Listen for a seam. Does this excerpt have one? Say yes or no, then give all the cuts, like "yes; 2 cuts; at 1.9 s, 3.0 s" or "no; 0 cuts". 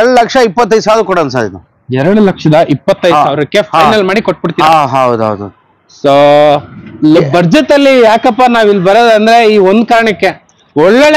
no; 0 cuts